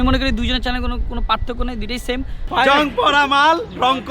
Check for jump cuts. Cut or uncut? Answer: cut